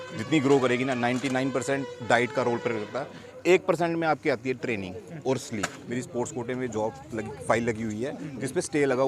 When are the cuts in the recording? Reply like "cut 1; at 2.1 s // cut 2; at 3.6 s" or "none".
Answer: cut 1; at 5.8 s